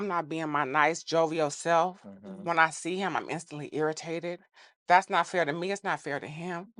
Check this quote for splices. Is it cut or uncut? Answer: uncut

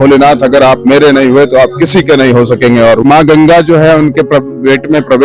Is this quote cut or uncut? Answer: cut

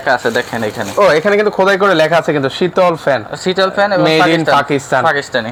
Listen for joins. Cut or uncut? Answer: uncut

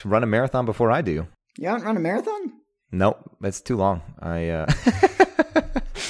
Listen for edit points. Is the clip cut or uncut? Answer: cut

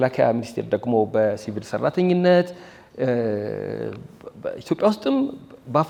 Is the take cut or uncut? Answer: uncut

